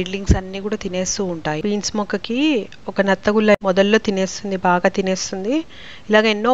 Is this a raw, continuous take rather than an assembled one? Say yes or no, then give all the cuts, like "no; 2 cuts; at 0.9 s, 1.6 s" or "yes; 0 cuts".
no; 1 cut; at 1.6 s